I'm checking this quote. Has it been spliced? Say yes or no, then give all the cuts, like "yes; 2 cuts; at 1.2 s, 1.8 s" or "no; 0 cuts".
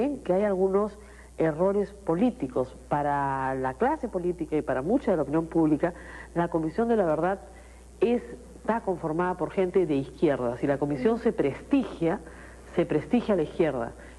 no; 0 cuts